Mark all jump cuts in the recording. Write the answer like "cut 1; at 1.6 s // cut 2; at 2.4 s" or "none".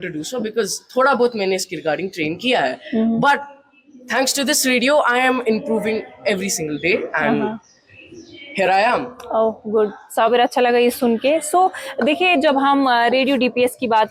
none